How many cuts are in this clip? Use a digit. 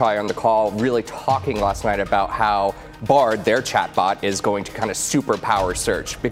0